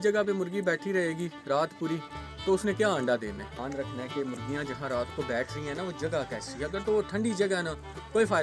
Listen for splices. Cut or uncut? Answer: cut